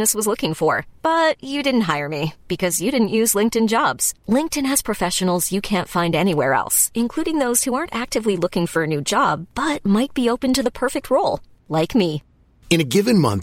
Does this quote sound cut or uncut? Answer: uncut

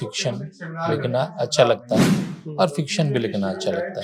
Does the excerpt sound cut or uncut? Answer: uncut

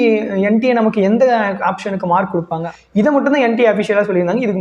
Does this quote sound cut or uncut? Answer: cut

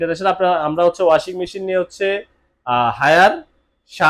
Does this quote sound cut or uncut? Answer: uncut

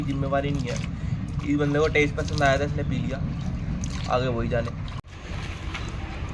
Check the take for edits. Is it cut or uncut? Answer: uncut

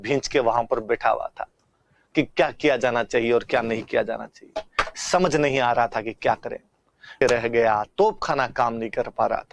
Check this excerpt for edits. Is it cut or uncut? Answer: cut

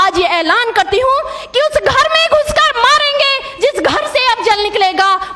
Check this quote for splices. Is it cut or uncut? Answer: uncut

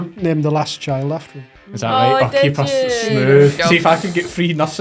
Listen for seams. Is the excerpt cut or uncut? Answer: cut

